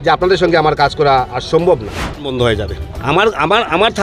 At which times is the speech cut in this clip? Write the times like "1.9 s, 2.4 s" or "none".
2.2 s